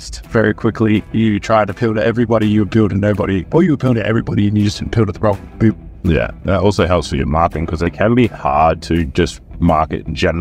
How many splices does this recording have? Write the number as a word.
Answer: four